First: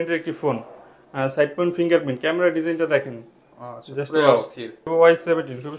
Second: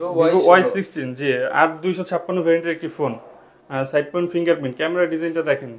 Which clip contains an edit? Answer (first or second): first